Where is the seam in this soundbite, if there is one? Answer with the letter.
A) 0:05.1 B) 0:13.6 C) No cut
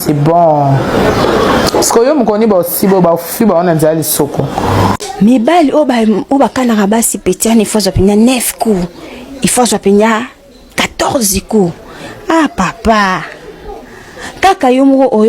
A